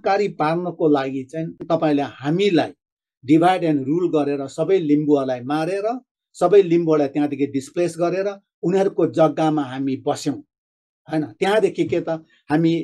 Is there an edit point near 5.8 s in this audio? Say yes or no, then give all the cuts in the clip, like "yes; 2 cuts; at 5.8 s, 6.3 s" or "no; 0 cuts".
no; 1 cut; at 1.6 s